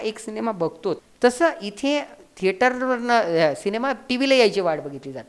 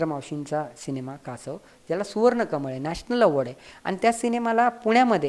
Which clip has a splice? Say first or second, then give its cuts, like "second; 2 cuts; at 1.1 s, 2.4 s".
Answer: first; 1 cut; at 1.1 s